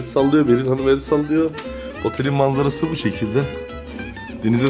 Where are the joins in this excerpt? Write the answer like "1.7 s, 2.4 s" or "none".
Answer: none